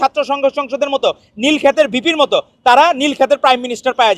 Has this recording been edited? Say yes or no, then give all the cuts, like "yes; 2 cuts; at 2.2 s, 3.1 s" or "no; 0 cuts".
no; 0 cuts